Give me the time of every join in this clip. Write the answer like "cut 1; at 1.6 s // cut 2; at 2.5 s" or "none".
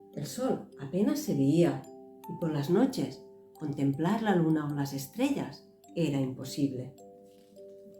cut 1; at 6.9 s